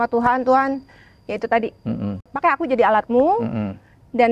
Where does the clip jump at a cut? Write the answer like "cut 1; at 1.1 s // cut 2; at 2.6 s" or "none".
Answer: cut 1; at 2.3 s